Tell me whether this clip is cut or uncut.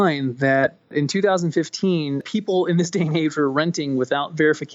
cut